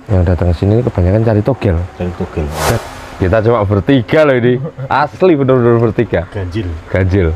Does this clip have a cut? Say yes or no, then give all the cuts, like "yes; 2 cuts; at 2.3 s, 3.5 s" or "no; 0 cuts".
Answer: yes; 1 cut; at 2.8 s